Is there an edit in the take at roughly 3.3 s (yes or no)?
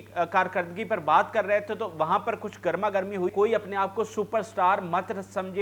yes